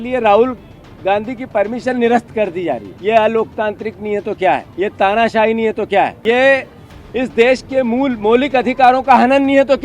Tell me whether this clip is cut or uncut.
cut